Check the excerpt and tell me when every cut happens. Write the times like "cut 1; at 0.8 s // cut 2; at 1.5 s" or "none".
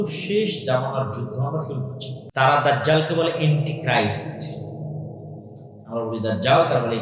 cut 1; at 2.2 s

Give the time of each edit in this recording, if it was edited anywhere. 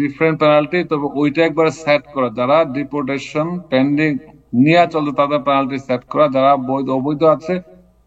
none

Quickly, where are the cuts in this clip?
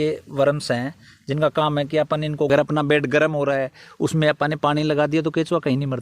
cut 1; at 2.5 s

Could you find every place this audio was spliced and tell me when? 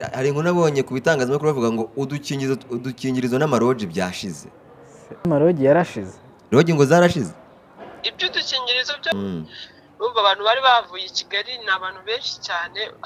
cut 1; at 5.2 s // cut 2; at 9.1 s

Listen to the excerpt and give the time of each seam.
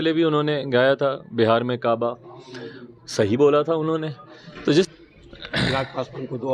cut 1; at 4.9 s

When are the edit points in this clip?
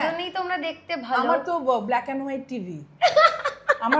none

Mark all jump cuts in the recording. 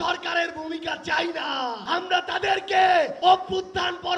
cut 1; at 1.8 s // cut 2; at 3.1 s

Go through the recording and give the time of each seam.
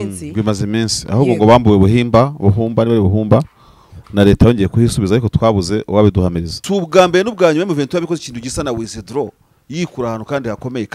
cut 1; at 6.5 s

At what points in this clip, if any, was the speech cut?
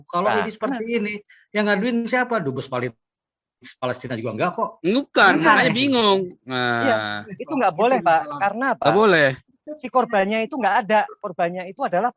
none

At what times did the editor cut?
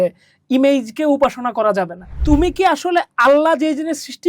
cut 1; at 2.0 s

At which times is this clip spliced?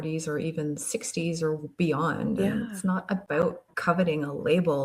cut 1; at 3.7 s

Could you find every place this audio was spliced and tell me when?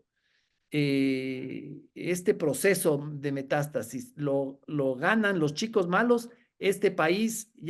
none

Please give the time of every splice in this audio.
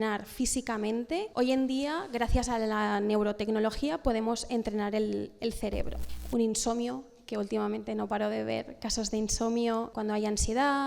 cut 1; at 1.3 s // cut 2; at 6.0 s // cut 3; at 9.9 s

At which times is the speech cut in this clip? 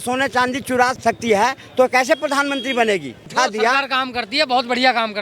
cut 1; at 1.0 s // cut 2; at 3.3 s

